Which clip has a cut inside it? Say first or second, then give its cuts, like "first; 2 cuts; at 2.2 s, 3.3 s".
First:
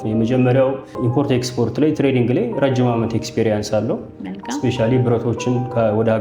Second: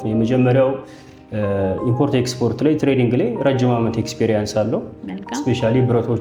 first; 1 cut; at 0.9 s